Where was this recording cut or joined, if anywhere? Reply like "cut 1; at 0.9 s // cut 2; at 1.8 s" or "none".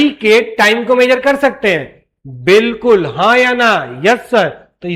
none